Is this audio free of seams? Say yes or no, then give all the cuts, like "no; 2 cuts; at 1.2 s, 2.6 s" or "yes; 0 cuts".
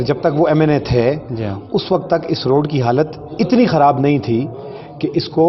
yes; 0 cuts